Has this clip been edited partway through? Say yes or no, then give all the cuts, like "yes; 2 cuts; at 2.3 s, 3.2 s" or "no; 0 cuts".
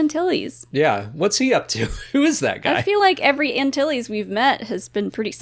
no; 0 cuts